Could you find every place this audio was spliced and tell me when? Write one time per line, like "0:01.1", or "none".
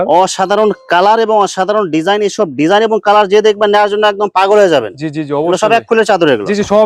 none